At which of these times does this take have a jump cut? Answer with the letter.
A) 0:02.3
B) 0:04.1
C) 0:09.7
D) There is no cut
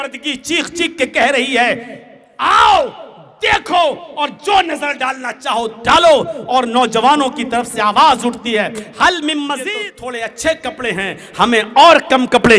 C